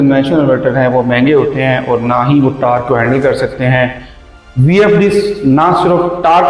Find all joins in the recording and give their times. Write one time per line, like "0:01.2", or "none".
none